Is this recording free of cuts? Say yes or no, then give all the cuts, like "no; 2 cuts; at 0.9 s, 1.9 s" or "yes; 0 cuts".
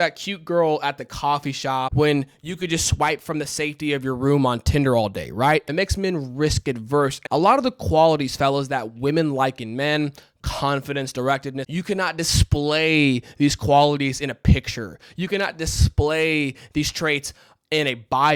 no; 4 cuts; at 1.9 s, 5.7 s, 7.2 s, 11.6 s